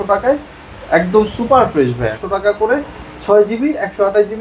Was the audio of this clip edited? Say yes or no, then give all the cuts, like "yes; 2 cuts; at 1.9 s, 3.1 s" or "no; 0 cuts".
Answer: yes; 1 cut; at 2.2 s